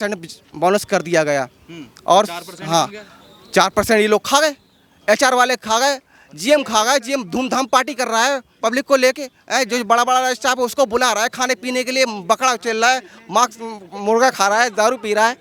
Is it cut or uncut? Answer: uncut